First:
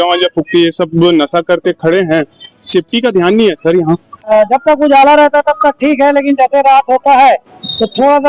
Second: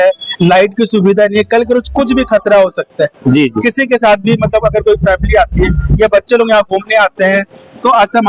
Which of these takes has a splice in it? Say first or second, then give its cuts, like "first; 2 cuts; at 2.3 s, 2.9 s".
first; 1 cut; at 4.3 s